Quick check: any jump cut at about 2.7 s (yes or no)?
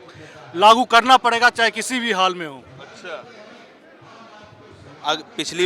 no